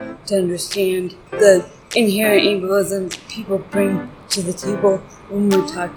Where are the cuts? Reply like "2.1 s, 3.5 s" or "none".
1.2 s, 1.8 s